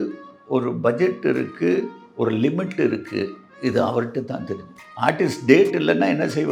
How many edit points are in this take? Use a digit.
0